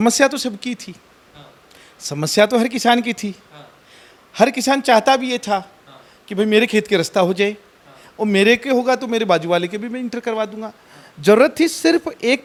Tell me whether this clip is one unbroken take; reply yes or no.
yes